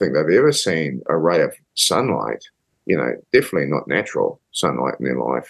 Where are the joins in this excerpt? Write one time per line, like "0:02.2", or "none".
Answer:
0:01.0
0:01.7